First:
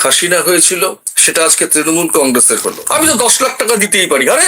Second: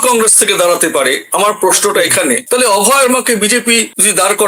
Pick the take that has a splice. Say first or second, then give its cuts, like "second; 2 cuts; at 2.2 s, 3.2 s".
first; 1 cut; at 2.8 s